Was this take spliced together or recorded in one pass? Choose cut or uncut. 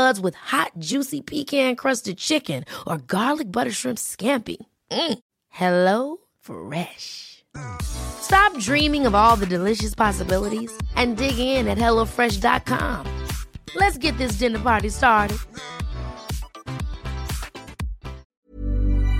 cut